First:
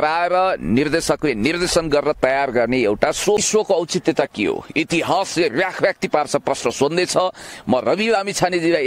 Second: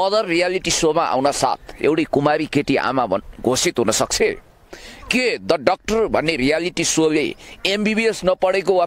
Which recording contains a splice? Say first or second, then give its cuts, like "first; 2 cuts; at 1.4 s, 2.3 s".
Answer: first; 1 cut; at 3.4 s